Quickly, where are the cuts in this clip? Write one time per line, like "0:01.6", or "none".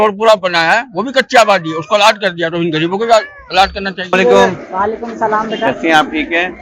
0:04.0